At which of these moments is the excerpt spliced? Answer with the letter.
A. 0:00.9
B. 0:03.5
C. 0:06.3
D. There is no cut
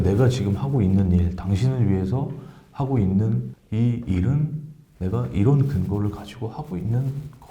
B